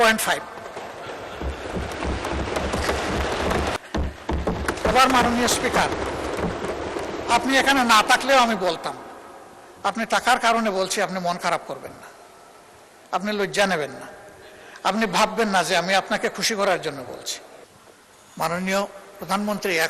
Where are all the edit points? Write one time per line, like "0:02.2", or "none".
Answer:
0:03.8
0:17.8